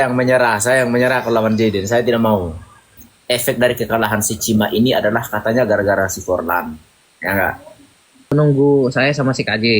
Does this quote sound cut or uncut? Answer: cut